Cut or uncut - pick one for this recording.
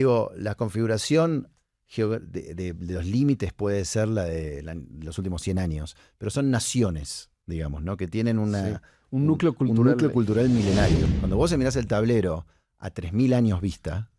cut